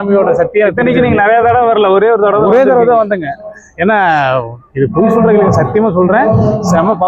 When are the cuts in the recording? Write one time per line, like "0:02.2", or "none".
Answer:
none